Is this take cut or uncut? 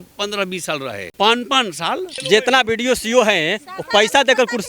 cut